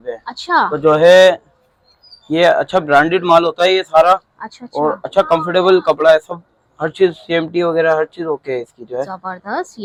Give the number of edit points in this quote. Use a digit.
0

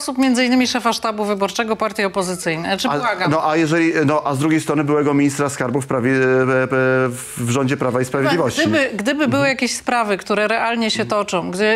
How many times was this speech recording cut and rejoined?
0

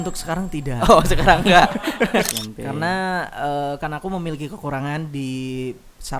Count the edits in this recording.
1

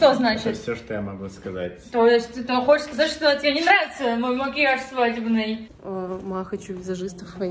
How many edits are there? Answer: 1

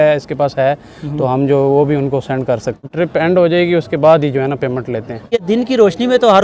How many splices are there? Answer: 2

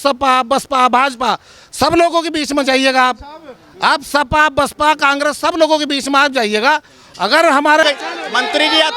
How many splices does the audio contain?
1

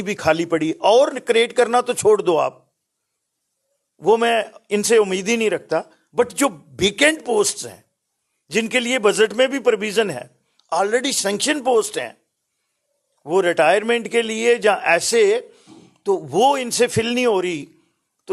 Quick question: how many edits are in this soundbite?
0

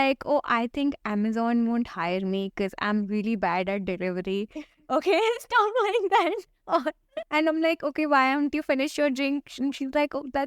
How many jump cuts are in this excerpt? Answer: 1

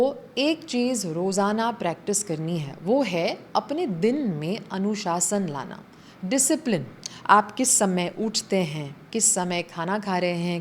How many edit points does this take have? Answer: 0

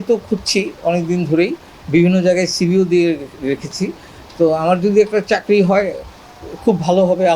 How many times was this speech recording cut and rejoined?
0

